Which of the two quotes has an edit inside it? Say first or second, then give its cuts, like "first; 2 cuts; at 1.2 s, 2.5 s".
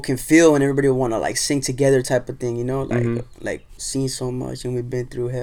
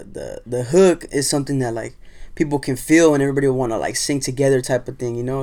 first; 1 cut; at 3.8 s